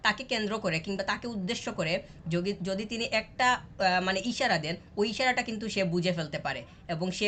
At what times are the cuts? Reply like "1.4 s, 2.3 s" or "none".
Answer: none